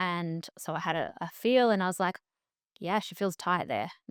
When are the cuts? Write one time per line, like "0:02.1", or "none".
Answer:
none